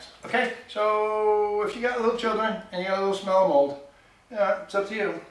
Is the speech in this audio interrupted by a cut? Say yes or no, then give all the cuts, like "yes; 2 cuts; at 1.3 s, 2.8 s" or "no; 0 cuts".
no; 0 cuts